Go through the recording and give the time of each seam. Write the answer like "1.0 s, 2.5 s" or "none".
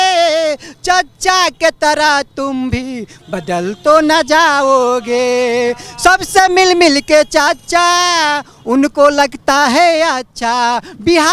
none